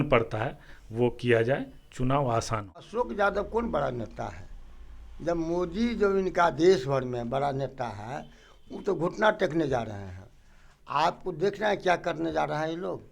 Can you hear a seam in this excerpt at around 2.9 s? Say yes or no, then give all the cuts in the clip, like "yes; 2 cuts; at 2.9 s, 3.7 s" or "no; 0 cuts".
yes; 1 cut; at 2.9 s